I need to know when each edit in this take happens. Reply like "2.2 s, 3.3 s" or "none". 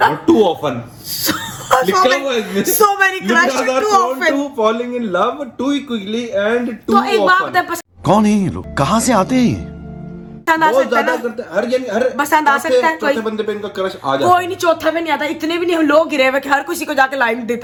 none